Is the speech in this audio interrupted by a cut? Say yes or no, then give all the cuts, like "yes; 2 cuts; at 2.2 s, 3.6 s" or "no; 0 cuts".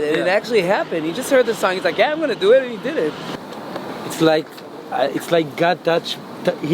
yes; 1 cut; at 3.3 s